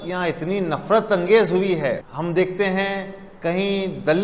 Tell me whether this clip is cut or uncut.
cut